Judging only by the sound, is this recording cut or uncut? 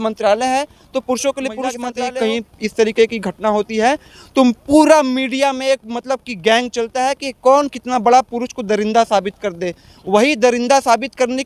cut